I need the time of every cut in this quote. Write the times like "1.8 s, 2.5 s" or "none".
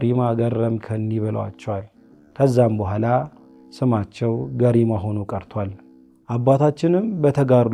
none